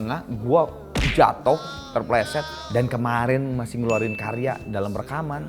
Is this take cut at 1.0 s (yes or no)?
no